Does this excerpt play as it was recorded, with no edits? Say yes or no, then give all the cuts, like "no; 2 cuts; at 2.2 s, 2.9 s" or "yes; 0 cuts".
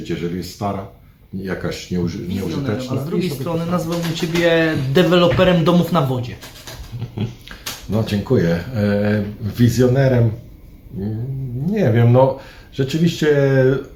no; 1 cut; at 3.0 s